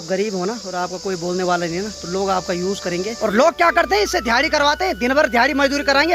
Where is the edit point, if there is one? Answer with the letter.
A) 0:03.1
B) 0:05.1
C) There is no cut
A